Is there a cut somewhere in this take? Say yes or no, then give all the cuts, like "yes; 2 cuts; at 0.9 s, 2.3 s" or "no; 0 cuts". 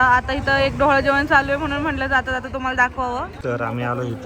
yes; 1 cut; at 3.3 s